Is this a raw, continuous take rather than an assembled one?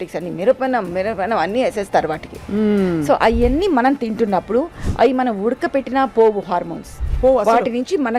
yes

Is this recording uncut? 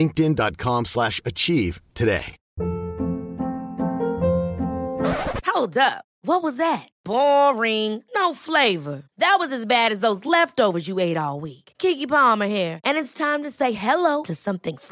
yes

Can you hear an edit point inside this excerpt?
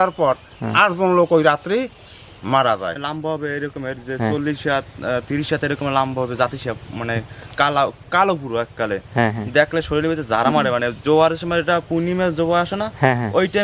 yes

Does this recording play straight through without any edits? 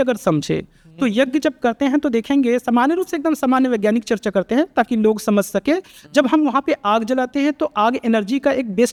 yes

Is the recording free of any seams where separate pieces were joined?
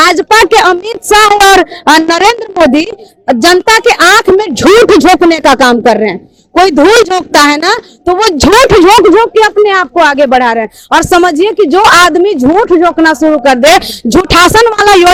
yes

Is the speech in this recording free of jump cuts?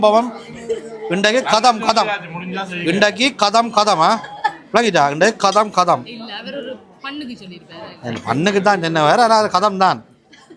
yes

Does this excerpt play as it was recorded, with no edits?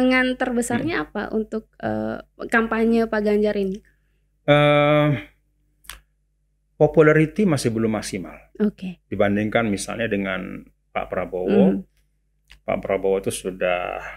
yes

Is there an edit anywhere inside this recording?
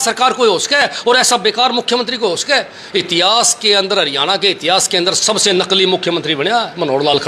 no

